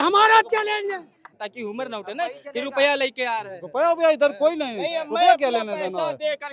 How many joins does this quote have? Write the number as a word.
one